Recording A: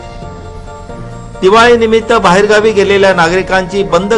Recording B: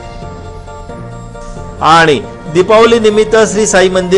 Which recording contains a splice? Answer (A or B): B